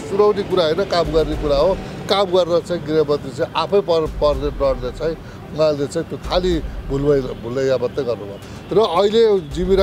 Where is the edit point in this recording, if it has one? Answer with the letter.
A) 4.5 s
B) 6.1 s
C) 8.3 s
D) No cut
C